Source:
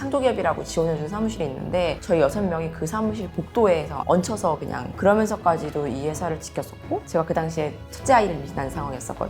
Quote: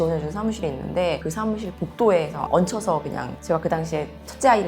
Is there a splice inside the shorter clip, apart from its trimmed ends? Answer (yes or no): yes